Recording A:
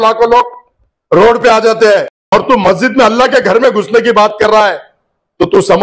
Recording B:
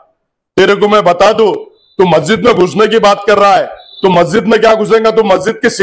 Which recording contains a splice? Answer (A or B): A